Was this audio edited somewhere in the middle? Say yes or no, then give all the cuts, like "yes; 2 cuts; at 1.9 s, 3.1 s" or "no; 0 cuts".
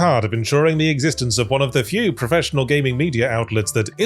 no; 0 cuts